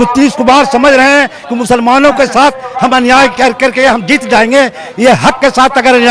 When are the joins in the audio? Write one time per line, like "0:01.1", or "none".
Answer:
none